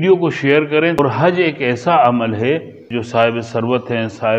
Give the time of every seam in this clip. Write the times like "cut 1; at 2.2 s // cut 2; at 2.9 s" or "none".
cut 1; at 0.9 s